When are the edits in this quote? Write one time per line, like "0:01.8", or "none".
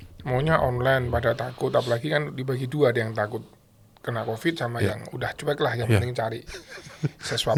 none